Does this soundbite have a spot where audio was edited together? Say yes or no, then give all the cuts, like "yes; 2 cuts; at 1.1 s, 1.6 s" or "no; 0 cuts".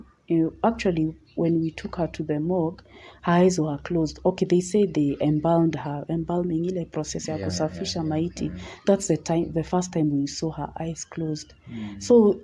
no; 0 cuts